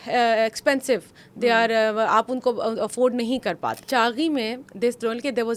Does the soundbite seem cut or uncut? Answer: cut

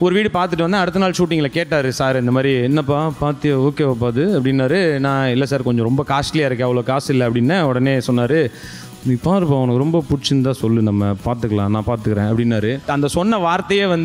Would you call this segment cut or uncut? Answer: cut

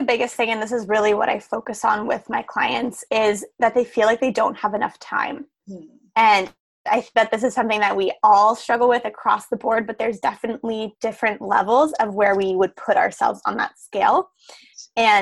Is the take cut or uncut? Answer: uncut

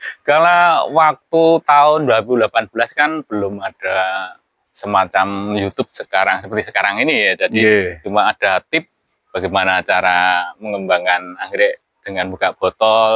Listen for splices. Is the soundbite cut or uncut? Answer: uncut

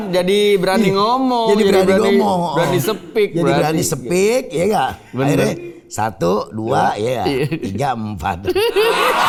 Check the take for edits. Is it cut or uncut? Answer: uncut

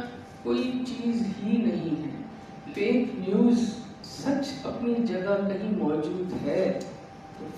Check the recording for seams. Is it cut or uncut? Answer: uncut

